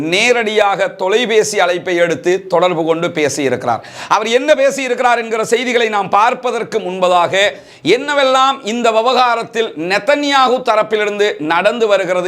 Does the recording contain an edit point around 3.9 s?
no; 0 cuts

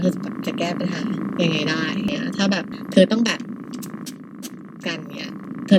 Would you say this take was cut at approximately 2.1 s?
yes; 1 cut; at 2.1 s

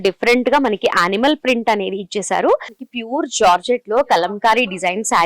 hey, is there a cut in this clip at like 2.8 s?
yes; 1 cut; at 2.8 s

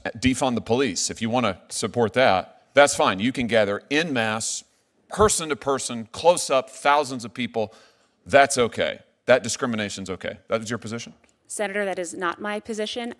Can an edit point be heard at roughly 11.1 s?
no; 0 cuts

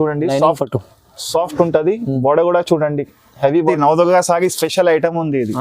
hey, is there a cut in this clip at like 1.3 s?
no; 1 cut; at 3.7 s

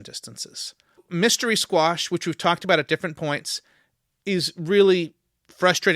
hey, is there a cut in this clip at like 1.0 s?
yes; 1 cut; at 1.0 s

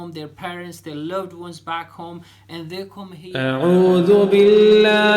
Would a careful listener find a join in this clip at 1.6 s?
no; 1 cut; at 3.3 s

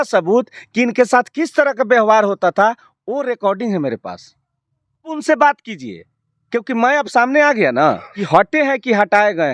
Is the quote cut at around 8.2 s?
yes; 2 cuts; at 5.1 s, 8.2 s

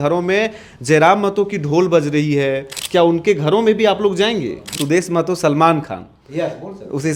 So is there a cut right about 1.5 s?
no; 2 cuts; at 2.7 s, 4.8 s

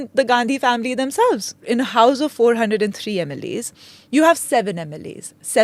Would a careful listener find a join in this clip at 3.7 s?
no; 1 cut; at 1.7 s

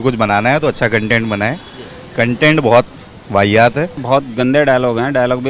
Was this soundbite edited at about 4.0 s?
yes; 1 cut; at 4.0 s

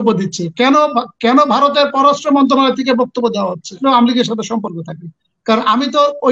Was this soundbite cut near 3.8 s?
yes; 1 cut; at 3.8 s

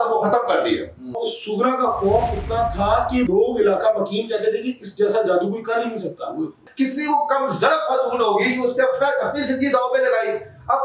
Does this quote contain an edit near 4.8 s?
no; 3 cuts; at 1.2 s, 3.3 s, 6.7 s

